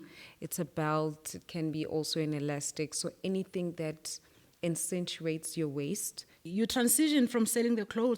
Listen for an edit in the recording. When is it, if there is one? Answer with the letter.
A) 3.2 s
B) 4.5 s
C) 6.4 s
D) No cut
C